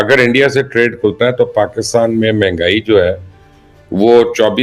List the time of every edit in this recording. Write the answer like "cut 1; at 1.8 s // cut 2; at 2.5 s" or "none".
none